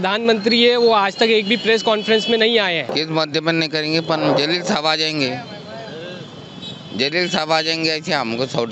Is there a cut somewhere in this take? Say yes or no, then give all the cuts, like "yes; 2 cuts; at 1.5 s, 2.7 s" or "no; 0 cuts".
yes; 1 cut; at 3.0 s